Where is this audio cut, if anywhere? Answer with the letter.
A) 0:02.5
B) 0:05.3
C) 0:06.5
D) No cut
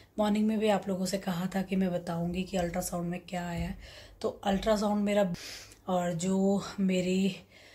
B